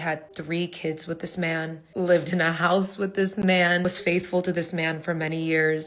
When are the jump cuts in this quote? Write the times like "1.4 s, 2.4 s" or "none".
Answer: 1.8 s, 3.8 s